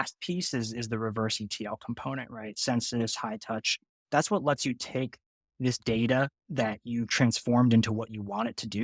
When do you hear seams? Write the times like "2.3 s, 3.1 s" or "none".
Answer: none